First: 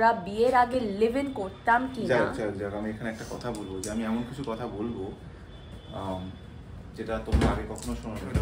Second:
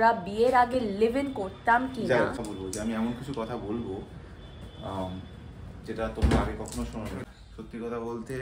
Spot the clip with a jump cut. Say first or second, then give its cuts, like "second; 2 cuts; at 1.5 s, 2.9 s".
second; 2 cuts; at 2.4 s, 7.2 s